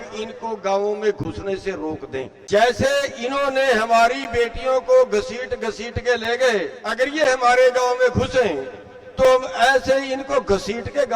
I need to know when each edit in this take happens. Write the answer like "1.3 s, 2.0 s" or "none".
2.4 s, 6.8 s